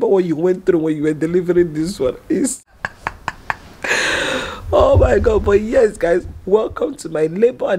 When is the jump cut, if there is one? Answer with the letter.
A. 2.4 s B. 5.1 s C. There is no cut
A